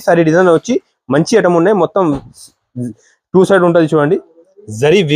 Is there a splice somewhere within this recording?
no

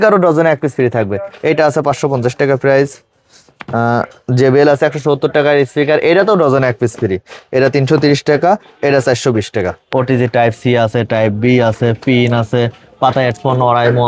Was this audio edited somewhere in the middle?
yes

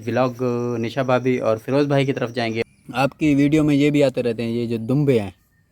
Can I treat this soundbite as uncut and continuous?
no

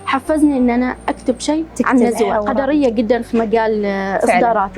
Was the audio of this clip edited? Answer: yes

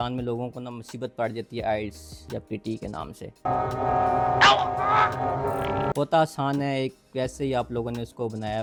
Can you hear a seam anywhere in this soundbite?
no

